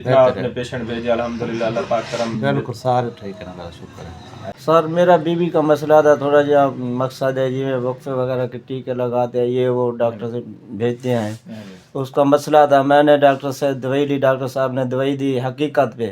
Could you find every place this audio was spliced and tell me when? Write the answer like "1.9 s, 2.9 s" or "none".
4.4 s